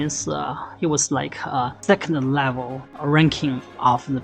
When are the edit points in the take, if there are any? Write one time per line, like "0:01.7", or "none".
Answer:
0:01.8
0:02.8